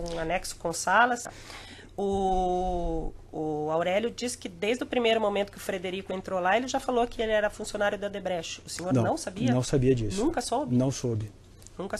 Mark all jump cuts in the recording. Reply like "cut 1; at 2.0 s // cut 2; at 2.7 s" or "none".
cut 1; at 1.3 s